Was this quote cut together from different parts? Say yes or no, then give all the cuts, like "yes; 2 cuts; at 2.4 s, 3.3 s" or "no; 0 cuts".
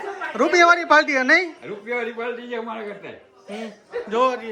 no; 0 cuts